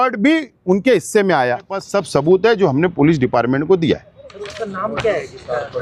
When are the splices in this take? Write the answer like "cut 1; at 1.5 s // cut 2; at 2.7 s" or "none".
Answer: cut 1; at 1.9 s